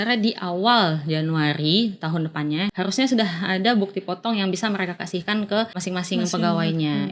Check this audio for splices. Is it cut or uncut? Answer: cut